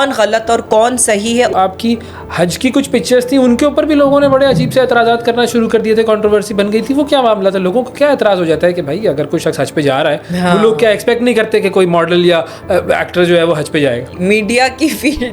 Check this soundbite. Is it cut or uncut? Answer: cut